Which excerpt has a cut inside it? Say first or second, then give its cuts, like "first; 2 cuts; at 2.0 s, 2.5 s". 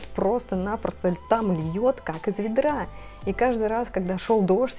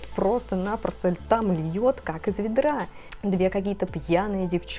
second; 1 cut; at 3.1 s